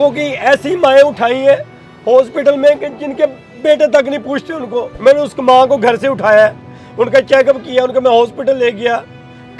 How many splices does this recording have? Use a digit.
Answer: 1